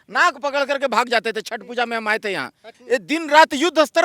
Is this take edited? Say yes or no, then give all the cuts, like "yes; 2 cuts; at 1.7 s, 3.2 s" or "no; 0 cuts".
yes; 1 cut; at 2.7 s